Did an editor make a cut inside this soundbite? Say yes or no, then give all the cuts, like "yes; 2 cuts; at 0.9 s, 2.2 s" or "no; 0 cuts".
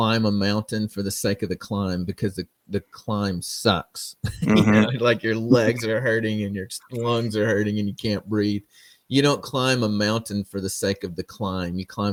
no; 0 cuts